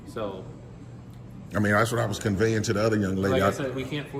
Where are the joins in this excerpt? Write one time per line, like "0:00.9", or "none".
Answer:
none